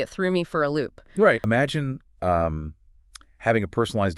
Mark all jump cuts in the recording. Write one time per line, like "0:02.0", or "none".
0:01.4